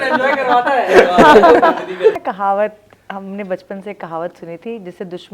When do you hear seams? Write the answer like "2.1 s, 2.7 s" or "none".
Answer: 2.2 s